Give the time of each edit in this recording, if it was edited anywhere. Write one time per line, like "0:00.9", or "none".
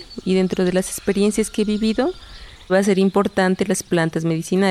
0:02.7